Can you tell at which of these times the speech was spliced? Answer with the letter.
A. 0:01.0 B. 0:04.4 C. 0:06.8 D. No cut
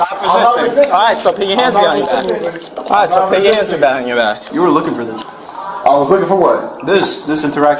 B